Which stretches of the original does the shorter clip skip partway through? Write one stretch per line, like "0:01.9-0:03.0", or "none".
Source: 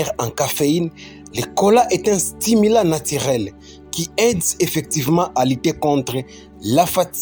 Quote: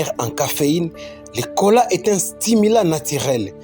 none